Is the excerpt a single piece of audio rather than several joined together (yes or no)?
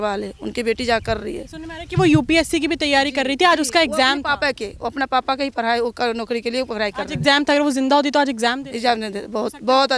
yes